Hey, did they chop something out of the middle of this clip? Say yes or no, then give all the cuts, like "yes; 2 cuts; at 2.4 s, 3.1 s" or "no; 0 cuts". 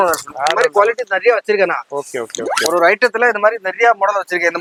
no; 0 cuts